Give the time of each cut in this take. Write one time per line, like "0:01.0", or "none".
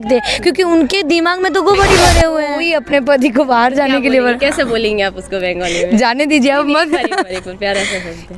0:02.6